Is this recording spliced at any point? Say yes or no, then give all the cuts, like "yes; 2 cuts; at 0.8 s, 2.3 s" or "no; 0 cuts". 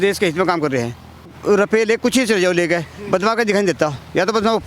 yes; 1 cut; at 1.3 s